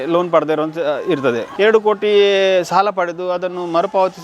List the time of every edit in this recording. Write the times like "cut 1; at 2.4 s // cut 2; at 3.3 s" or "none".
cut 1; at 1.5 s